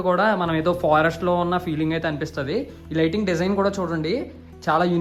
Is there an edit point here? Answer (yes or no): no